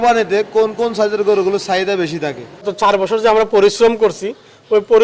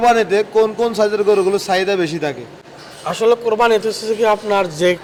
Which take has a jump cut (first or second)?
first